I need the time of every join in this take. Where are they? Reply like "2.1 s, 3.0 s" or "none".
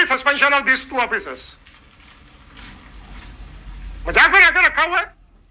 none